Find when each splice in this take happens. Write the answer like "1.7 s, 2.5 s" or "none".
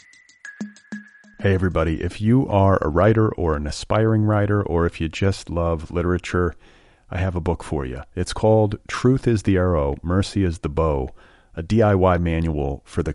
0.9 s